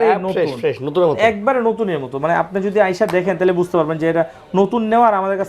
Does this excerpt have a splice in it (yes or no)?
no